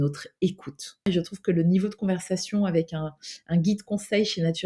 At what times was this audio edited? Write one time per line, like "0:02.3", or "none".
0:01.1

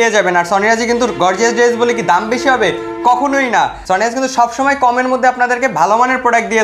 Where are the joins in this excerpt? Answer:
0:03.8

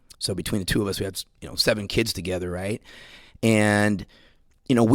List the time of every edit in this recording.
none

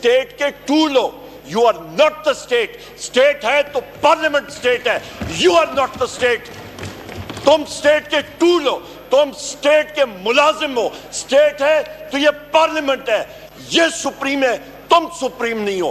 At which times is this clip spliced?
none

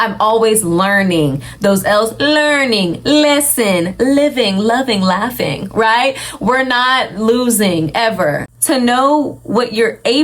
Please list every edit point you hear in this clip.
0:08.5

